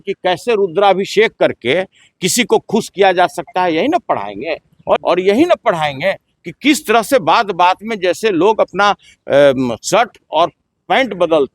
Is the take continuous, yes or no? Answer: no